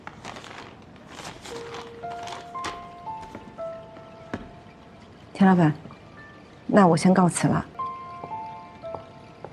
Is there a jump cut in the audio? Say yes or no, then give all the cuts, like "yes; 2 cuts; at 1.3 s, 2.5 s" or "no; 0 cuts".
yes; 1 cut; at 7.7 s